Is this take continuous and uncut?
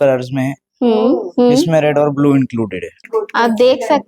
no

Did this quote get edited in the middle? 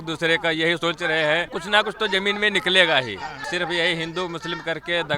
yes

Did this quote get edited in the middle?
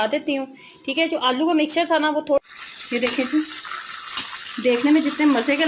yes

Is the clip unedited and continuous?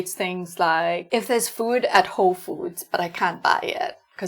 no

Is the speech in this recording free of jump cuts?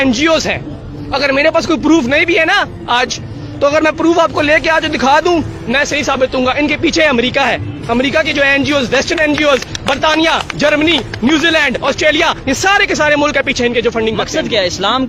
yes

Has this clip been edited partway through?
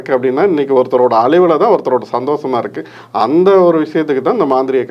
no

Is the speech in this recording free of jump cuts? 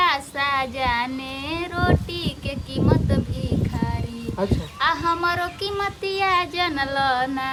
yes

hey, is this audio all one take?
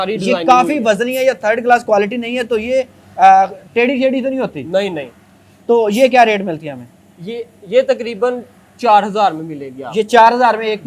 yes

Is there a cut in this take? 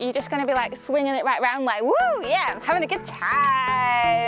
no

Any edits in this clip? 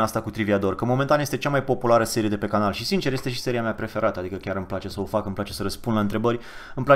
no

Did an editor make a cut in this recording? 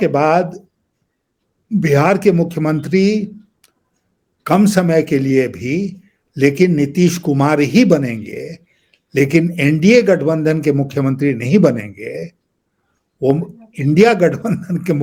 no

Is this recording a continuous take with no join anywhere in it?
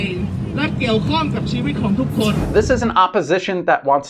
no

